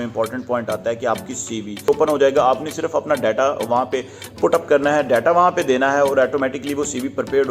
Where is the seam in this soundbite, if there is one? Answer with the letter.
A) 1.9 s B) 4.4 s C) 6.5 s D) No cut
A